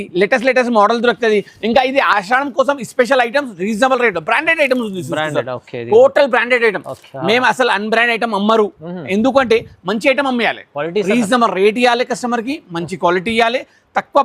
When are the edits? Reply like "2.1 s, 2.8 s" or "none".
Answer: none